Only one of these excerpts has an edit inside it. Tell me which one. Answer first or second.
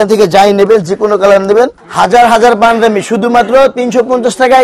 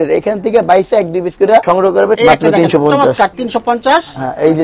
second